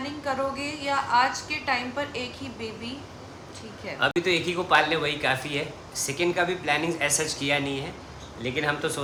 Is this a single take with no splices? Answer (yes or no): yes